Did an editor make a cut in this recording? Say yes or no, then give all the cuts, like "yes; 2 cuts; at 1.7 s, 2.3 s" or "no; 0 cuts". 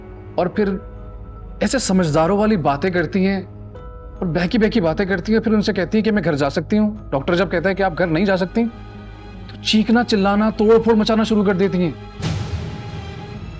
no; 0 cuts